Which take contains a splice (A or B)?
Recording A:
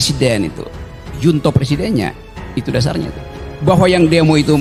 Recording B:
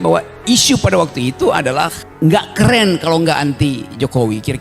B